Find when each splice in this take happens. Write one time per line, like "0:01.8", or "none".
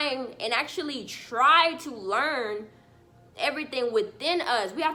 none